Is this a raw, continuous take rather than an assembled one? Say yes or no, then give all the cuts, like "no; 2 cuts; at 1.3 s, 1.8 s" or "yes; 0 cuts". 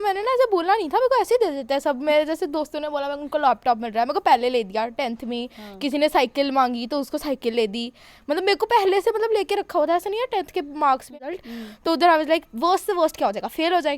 no; 1 cut; at 11.1 s